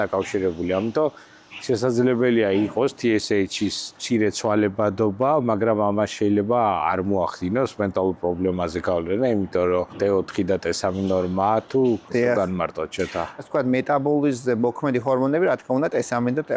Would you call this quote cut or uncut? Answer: cut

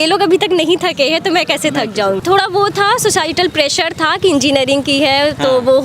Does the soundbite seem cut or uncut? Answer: cut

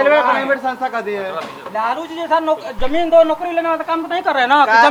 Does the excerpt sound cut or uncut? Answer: uncut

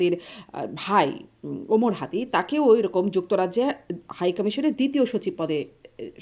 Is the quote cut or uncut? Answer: uncut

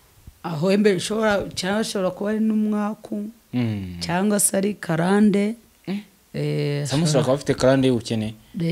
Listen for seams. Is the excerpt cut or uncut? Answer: uncut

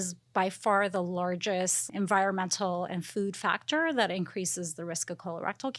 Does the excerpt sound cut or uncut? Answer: cut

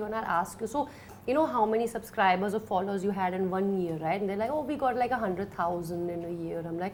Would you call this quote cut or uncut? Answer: uncut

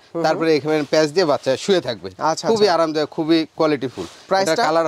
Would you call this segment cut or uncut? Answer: uncut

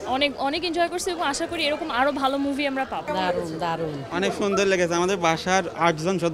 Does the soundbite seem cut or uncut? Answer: uncut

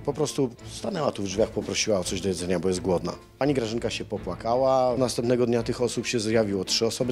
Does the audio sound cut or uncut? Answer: cut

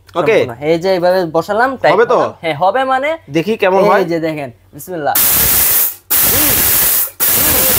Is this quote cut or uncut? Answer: uncut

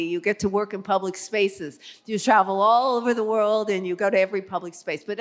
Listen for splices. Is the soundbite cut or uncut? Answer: uncut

